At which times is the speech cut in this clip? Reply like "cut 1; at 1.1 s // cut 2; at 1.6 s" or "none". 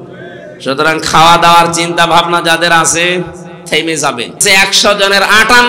cut 1; at 4.4 s